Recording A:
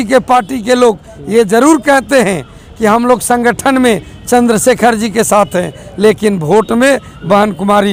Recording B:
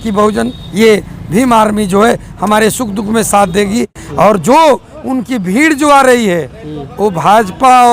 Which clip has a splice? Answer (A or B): B